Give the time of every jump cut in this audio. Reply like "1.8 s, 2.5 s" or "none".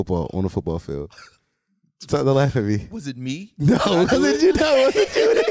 none